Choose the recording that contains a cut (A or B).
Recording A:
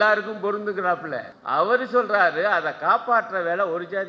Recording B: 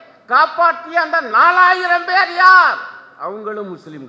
A